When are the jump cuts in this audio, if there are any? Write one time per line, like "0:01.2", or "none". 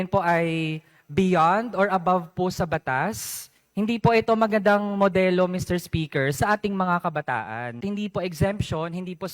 0:07.8